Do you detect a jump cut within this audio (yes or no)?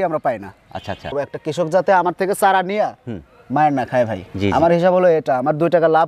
yes